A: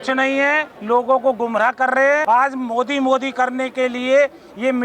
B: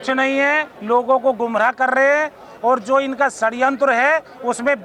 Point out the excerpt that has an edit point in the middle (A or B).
A